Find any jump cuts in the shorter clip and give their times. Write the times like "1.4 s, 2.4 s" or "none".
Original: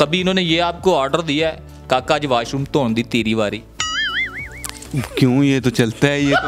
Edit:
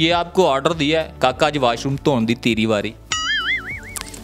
1.1 s